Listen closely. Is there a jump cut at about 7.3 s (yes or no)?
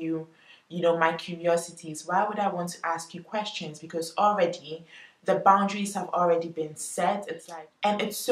yes